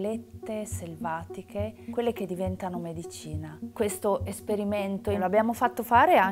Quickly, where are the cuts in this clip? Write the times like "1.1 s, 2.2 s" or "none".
3.6 s, 5.2 s